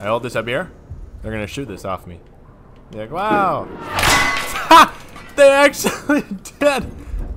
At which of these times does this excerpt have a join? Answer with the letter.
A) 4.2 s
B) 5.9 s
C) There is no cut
C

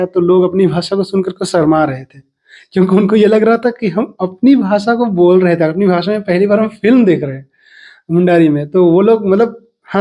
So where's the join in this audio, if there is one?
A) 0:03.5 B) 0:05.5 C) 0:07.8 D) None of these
D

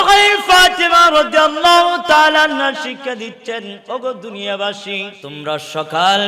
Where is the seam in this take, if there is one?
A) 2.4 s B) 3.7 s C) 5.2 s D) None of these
C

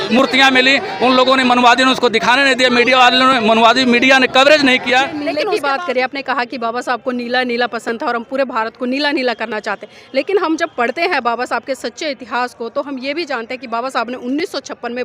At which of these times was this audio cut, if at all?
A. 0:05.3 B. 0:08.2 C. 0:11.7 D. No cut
A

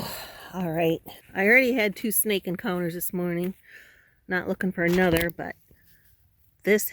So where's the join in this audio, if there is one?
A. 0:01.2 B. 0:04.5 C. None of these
A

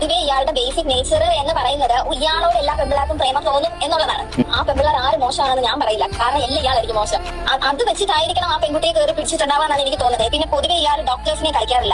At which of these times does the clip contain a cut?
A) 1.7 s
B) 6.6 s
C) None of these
C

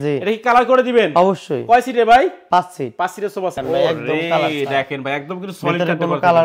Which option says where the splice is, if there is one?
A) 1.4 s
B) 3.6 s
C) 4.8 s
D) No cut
B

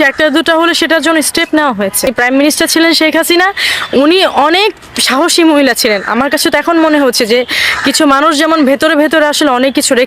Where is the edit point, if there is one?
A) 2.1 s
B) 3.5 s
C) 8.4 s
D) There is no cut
A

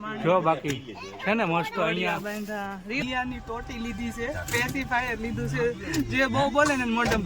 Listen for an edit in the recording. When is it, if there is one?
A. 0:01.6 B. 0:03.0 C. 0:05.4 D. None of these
B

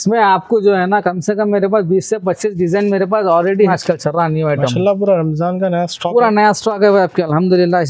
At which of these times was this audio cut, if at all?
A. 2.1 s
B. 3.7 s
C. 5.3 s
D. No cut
B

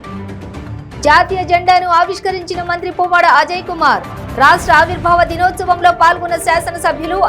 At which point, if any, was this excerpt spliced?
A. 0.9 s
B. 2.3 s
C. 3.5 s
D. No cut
A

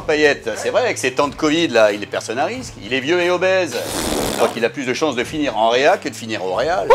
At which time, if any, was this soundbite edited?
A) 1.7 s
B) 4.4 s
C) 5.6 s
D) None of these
B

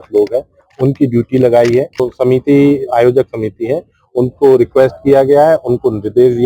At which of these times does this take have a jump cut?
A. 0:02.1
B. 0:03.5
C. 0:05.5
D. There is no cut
A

